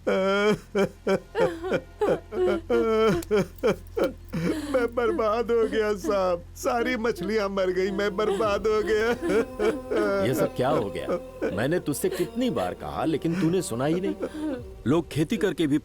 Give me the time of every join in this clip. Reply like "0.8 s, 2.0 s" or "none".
2.4 s